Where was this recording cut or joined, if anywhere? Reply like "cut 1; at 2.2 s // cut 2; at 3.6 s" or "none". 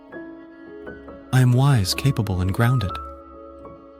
cut 1; at 1.0 s // cut 2; at 2.9 s